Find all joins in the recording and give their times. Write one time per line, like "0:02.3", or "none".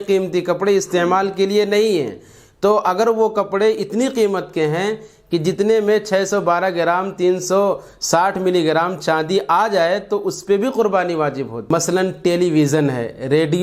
0:11.6